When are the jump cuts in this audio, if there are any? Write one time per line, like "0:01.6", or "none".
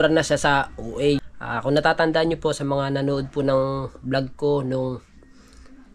0:01.4